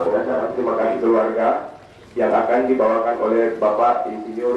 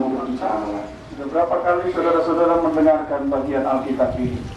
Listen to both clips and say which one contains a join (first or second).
second